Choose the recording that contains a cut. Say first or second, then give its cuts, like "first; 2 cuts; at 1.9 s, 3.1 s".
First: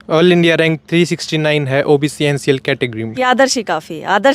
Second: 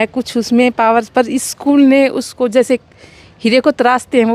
first; 1 cut; at 3.2 s